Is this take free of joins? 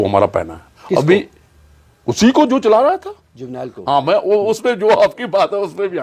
yes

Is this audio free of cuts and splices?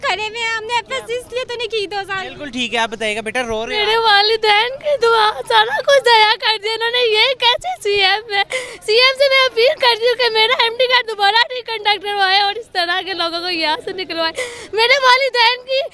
yes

